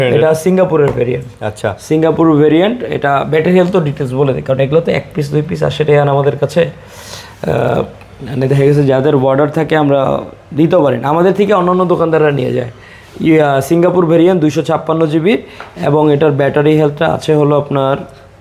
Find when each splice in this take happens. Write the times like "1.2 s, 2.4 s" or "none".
none